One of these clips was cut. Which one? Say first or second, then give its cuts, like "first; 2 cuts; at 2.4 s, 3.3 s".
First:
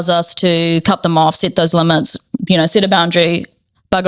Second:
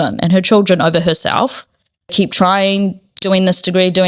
second; 1 cut; at 2.1 s